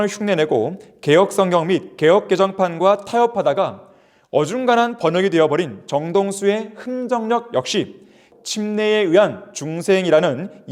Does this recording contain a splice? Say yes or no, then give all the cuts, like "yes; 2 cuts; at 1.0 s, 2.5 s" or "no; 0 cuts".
yes; 1 cut; at 8.3 s